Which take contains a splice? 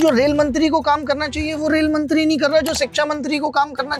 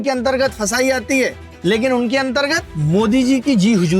second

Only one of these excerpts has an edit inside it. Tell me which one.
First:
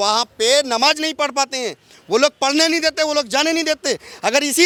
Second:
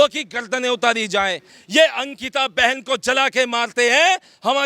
second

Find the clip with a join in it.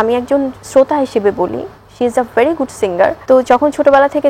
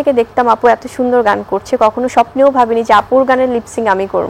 first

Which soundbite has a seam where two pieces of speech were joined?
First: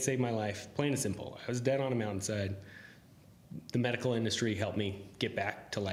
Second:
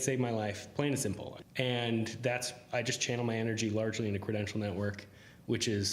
second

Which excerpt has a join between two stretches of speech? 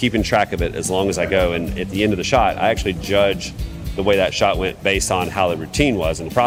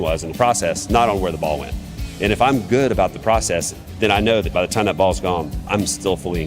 second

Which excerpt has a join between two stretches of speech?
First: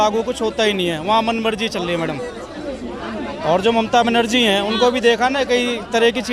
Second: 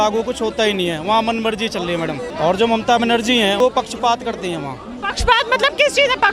second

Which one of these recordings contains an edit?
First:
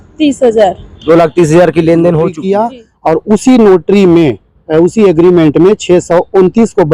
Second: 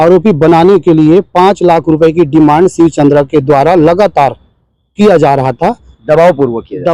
first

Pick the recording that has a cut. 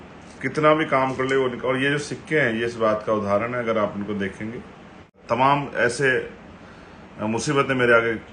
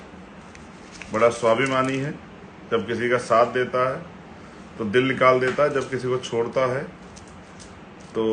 first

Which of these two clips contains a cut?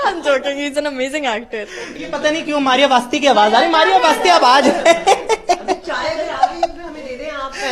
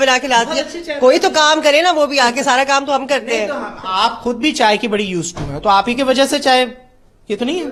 first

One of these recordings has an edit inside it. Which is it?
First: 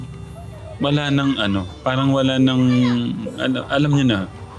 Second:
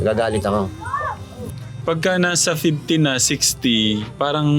second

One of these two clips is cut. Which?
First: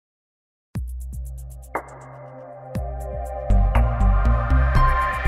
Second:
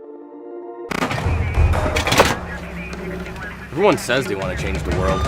second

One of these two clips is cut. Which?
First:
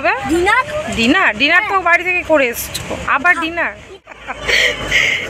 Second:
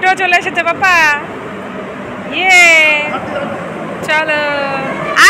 first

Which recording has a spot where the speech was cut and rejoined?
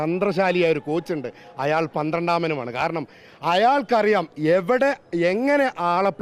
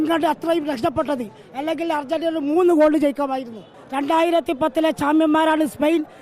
second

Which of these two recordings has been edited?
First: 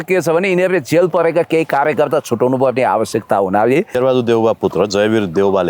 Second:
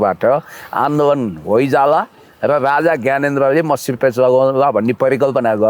first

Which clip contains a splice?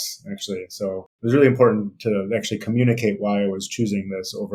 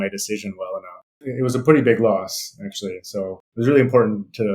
second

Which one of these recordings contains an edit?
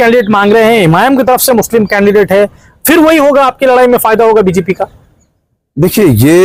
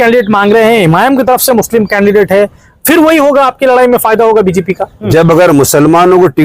second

